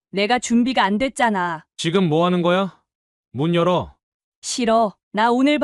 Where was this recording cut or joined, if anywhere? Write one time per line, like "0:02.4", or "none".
0:01.6